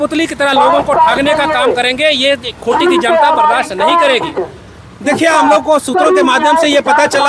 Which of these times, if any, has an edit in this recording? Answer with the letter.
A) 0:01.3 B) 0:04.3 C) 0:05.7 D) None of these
B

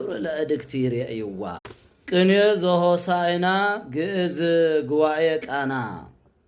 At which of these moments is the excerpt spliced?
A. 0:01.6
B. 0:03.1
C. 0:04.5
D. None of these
A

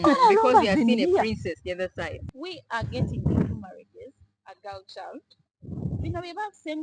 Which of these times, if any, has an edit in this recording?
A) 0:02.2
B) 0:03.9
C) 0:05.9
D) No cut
A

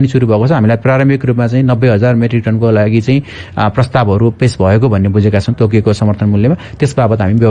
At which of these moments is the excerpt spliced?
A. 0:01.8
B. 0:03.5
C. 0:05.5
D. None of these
C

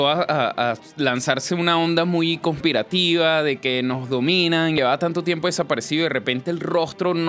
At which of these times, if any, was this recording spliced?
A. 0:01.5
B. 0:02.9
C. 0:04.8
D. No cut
C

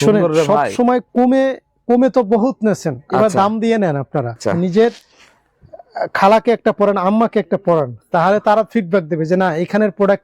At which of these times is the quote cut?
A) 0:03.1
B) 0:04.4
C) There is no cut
B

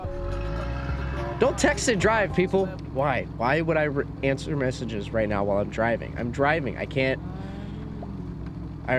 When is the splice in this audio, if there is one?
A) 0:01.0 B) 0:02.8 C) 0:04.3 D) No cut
B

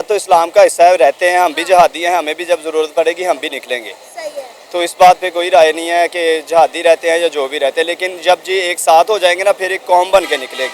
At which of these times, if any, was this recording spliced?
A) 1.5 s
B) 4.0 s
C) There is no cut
C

